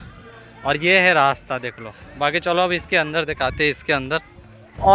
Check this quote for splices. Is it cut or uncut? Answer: uncut